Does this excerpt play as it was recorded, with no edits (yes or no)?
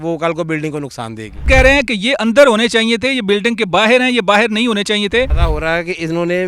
no